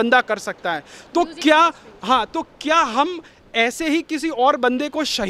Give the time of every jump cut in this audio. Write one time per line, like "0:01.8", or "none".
none